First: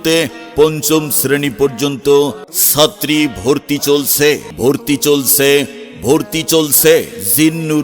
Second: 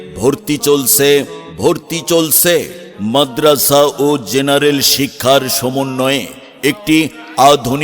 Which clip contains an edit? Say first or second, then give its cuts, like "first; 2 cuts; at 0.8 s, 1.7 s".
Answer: first; 2 cuts; at 2.5 s, 4.5 s